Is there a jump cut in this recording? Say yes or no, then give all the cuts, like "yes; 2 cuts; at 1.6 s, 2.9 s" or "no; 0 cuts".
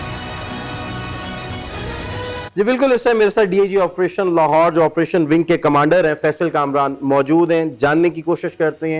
no; 0 cuts